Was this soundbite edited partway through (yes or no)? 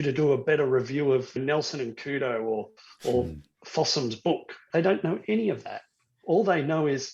yes